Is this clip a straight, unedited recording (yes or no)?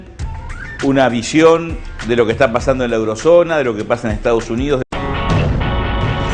yes